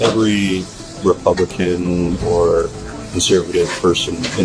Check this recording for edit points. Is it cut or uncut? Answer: cut